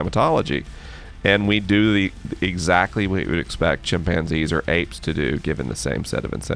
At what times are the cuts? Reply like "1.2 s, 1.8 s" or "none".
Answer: none